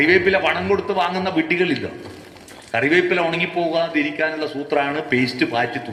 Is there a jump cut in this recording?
no; 0 cuts

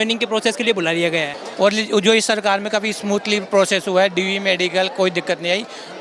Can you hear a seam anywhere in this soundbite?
yes; 1 cut; at 1.3 s

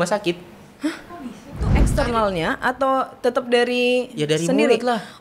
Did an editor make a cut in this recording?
yes; 1 cut; at 1.8 s

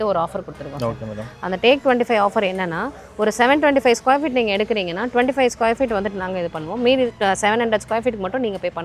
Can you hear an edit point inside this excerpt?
no; 0 cuts

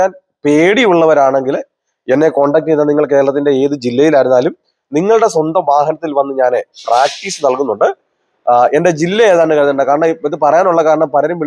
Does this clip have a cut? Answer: no; 0 cuts

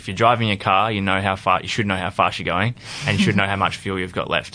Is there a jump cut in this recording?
no; 0 cuts

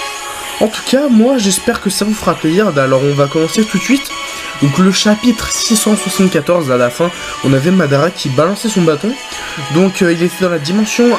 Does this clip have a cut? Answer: yes; 1 cut; at 5.5 s

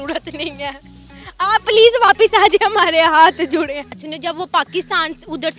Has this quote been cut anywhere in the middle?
yes; 1 cut; at 4.1 s

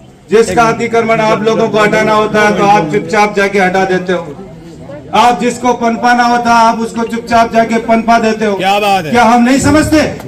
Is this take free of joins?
yes; 0 cuts

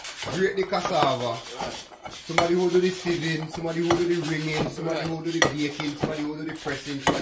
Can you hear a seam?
no; 0 cuts

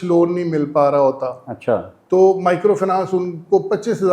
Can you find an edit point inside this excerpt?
no; 0 cuts

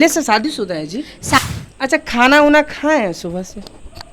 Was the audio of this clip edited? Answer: yes; 1 cut; at 1.4 s

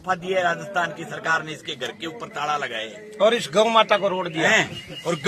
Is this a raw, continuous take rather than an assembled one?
yes; 0 cuts

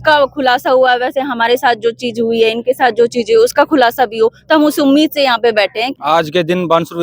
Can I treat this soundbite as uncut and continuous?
no; 1 cut; at 5.9 s

